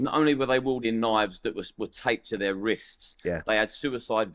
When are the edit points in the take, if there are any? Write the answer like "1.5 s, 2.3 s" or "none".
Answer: none